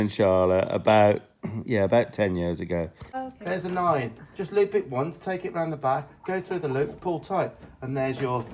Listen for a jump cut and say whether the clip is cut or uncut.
cut